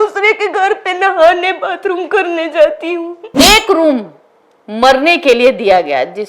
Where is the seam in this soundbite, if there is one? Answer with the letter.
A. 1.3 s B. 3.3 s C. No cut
B